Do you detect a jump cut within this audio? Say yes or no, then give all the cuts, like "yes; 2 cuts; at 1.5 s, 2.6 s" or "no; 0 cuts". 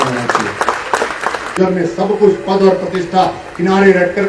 yes; 1 cut; at 1.5 s